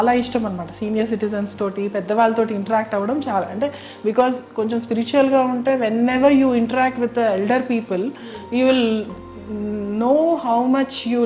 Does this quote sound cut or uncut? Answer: uncut